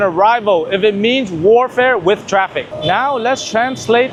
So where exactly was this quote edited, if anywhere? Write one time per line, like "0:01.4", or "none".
none